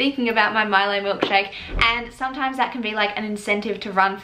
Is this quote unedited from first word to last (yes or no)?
yes